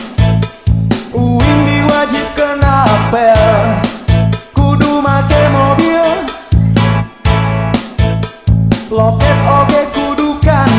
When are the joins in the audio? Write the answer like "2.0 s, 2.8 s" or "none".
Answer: 0.9 s